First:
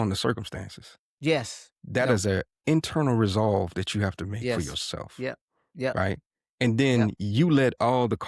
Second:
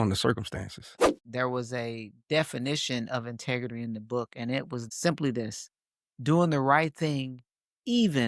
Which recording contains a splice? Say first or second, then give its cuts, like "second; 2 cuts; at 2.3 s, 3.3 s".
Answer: second; 2 cuts; at 1.2 s, 4.8 s